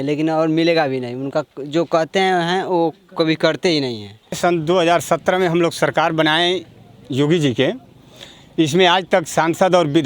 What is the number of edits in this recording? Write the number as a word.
one